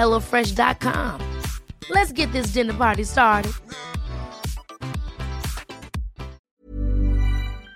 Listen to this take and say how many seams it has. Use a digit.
1